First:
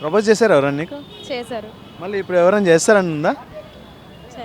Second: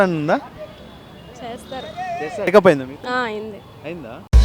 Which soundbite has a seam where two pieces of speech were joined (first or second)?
second